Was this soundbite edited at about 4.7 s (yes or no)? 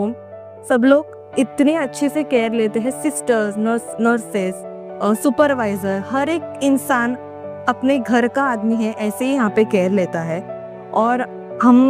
no